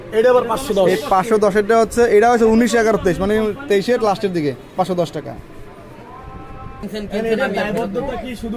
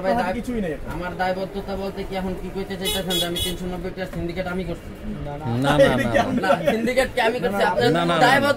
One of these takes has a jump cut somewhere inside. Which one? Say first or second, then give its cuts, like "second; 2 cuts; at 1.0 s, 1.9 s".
first; 1 cut; at 6.8 s